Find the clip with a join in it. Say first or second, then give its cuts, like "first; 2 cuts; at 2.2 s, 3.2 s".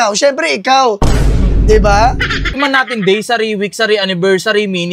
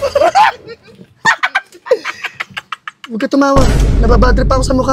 first; 1 cut; at 2.6 s